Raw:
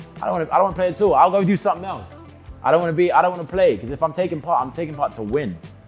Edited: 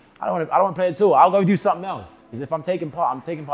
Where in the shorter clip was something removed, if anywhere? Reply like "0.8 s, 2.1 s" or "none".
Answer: 2.4 s